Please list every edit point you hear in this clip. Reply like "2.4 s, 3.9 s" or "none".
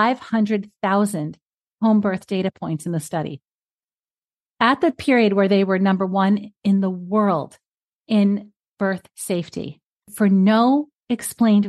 10.1 s